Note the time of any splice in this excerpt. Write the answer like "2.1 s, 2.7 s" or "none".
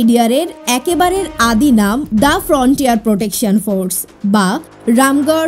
2.0 s